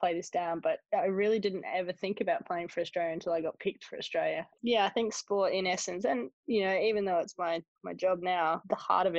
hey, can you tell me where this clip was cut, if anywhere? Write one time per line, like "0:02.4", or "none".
0:04.6